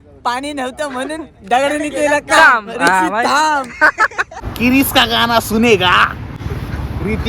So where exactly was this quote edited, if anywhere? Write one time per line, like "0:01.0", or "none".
0:04.4
0:06.4

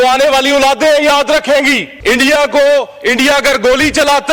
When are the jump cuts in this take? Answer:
0:01.9

